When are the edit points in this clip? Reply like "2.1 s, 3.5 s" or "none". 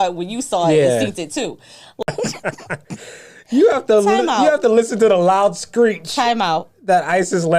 2.0 s